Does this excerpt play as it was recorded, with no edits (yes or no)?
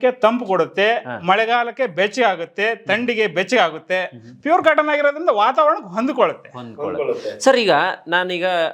yes